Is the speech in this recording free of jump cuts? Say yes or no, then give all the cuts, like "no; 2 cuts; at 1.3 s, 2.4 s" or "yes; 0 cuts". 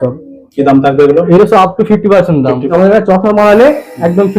no; 1 cut; at 2.7 s